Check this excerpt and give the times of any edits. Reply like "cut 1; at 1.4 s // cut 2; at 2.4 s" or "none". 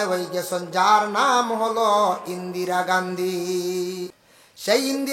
cut 1; at 4.1 s